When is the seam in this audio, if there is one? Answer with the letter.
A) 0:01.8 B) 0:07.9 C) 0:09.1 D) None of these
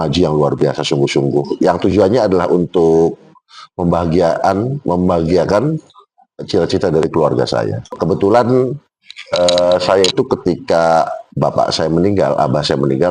B